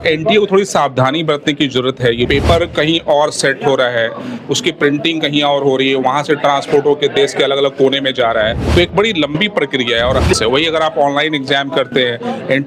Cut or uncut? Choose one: cut